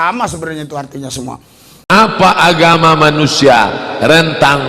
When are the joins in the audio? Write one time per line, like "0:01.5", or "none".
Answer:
0:01.9